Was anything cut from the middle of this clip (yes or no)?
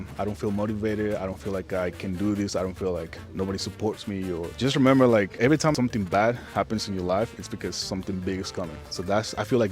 yes